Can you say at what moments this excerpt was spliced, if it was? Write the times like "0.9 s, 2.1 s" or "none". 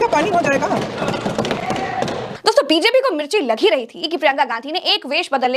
none